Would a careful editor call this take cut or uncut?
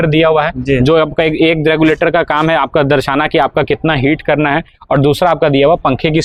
uncut